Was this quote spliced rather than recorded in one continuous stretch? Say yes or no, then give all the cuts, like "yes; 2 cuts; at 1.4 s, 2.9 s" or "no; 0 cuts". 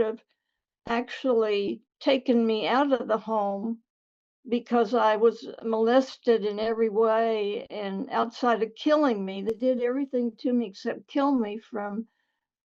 no; 0 cuts